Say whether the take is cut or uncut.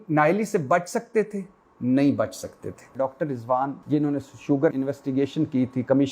cut